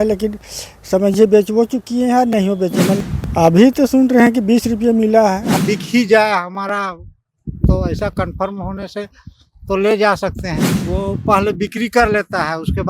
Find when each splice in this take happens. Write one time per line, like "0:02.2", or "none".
0:03.0
0:05.5
0:10.8